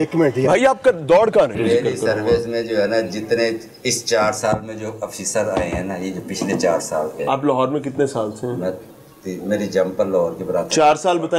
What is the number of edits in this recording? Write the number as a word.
one